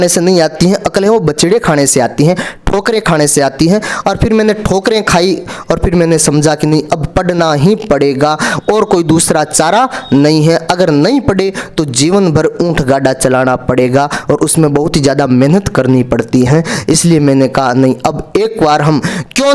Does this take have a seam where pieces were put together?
no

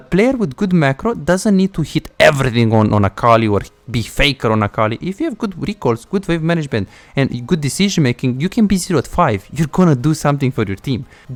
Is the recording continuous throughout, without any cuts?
yes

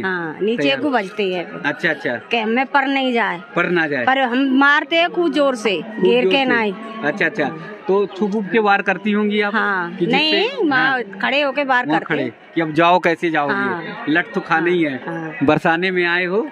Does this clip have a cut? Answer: no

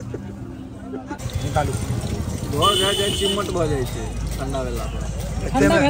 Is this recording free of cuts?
no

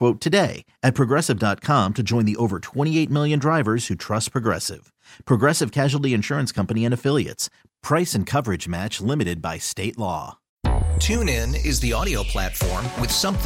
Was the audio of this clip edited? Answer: yes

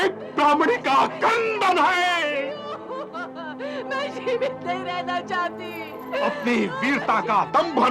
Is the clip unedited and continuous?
no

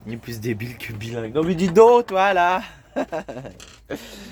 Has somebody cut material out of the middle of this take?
no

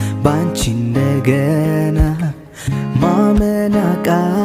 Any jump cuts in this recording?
no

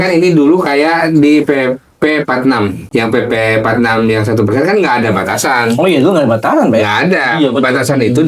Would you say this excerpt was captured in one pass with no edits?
no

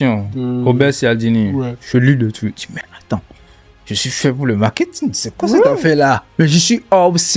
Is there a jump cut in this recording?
no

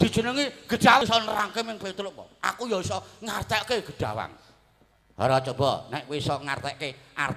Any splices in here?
yes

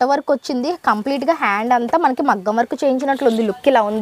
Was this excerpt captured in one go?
yes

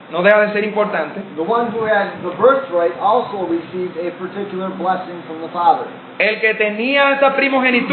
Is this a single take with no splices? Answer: yes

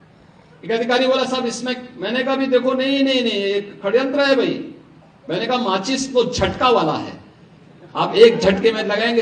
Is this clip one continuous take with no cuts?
yes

